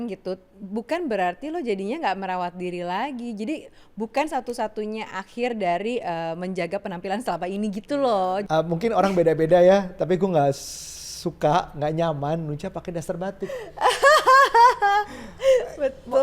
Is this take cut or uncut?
cut